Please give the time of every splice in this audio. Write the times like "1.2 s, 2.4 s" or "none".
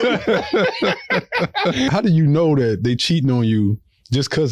1.9 s